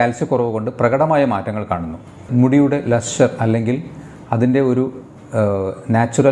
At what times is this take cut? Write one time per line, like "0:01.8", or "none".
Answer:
0:02.2